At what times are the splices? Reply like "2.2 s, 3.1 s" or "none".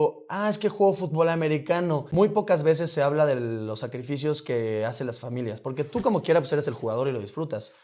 2.1 s